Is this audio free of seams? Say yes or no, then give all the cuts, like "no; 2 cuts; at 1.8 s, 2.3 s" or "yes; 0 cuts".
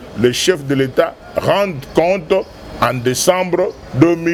yes; 0 cuts